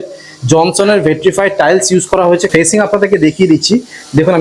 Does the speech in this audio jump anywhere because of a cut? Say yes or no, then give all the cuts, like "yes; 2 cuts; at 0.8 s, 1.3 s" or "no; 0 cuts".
yes; 1 cut; at 2.5 s